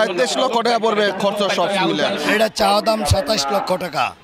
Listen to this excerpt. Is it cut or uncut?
cut